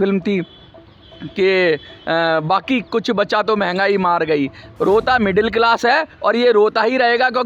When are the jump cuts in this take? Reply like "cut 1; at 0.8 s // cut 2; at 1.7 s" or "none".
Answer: cut 1; at 4.7 s